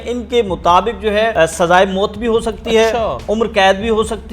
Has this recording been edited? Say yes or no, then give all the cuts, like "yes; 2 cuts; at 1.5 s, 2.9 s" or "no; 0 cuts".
yes; 1 cut; at 1.3 s